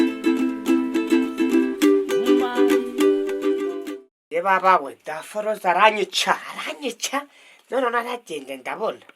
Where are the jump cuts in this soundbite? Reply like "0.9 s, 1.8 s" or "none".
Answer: 3.8 s